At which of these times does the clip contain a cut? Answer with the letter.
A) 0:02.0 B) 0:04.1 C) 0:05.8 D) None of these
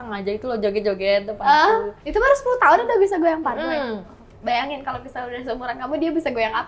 A